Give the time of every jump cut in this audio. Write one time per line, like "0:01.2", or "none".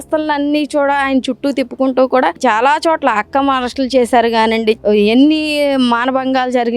0:02.4
0:04.8